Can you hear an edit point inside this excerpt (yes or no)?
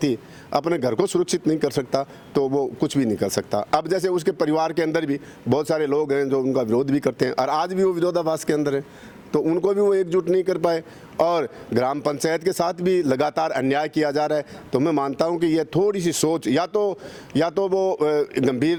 no